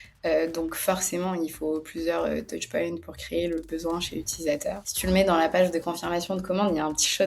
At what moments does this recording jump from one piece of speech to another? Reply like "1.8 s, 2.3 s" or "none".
4.9 s